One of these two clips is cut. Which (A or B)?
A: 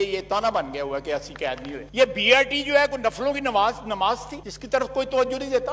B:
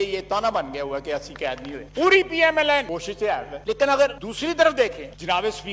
A